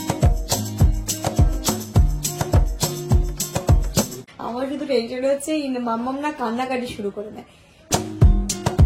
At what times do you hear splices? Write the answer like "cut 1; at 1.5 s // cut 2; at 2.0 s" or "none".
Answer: cut 1; at 4.1 s // cut 2; at 7.8 s